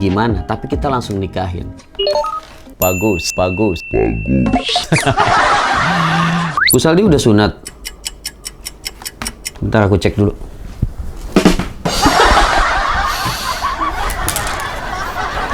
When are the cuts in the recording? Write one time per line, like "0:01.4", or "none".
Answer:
0:06.6